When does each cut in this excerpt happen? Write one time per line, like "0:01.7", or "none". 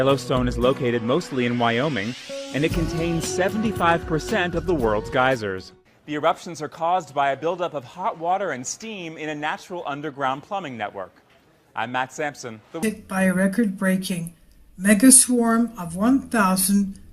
0:09.4